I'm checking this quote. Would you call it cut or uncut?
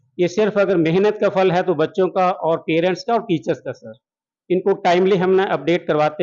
uncut